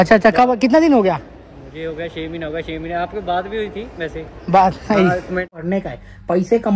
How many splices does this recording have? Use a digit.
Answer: 1